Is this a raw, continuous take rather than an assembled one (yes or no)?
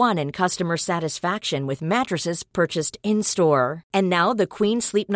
yes